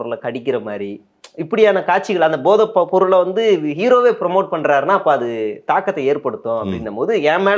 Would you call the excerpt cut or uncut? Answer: uncut